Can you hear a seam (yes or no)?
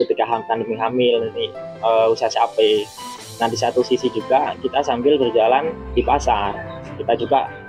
yes